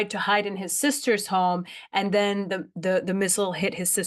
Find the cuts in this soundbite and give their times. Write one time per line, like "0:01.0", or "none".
none